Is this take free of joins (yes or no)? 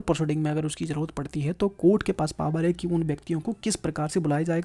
yes